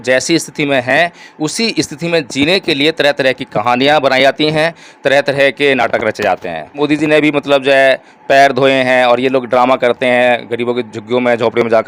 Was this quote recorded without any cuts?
yes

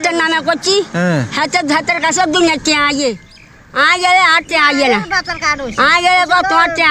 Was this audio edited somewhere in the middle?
no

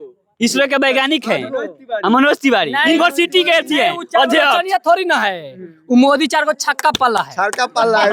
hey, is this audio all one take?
yes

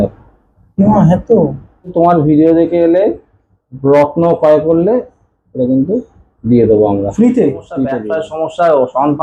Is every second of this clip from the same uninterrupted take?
no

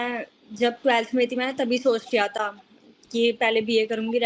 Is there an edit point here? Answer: no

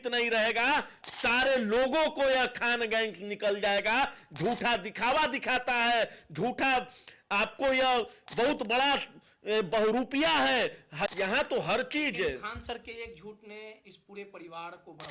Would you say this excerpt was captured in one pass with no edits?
no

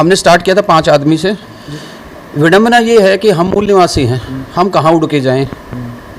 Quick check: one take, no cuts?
no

